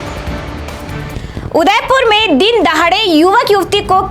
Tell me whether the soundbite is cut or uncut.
cut